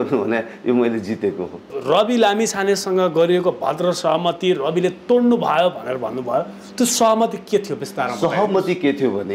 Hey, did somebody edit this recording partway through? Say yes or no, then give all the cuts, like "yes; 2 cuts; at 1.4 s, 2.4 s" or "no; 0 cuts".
yes; 1 cut; at 1.7 s